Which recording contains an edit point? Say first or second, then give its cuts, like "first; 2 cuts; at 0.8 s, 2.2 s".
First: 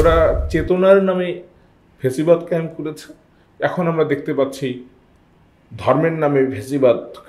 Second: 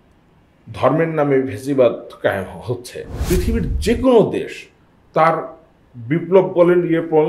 second; 1 cut; at 3.2 s